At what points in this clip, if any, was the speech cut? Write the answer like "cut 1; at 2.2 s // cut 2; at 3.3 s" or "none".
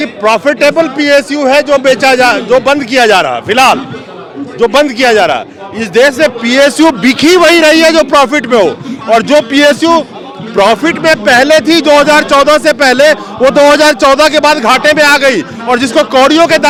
none